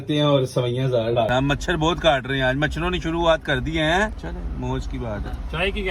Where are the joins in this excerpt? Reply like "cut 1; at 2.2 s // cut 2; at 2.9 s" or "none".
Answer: cut 1; at 1.3 s // cut 2; at 4.2 s